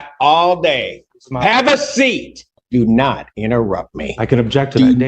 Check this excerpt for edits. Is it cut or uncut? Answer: cut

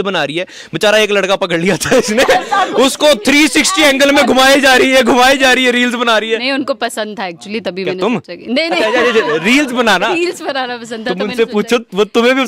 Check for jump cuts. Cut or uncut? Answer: uncut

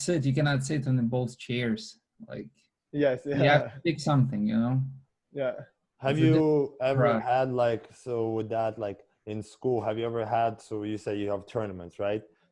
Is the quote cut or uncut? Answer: uncut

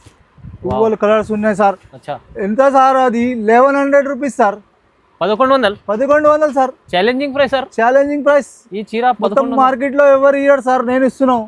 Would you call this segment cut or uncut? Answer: uncut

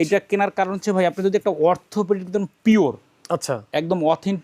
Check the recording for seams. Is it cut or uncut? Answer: uncut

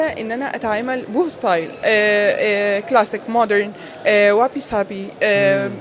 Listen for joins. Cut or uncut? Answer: uncut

